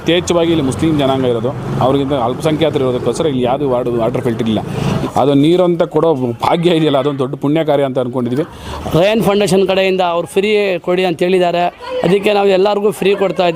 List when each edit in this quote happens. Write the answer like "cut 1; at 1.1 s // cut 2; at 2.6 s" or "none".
cut 1; at 4.8 s // cut 2; at 8.6 s